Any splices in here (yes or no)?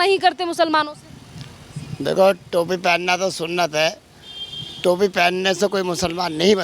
no